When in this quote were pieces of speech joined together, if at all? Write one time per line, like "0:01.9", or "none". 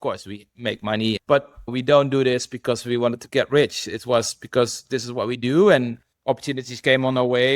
0:01.2